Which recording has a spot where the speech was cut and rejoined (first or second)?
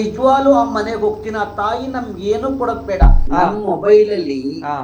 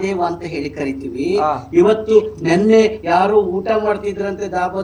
first